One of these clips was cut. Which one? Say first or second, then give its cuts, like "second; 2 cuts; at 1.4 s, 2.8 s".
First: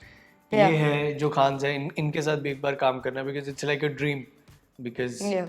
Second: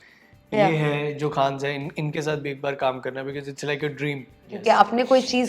second; 1 cut; at 4.5 s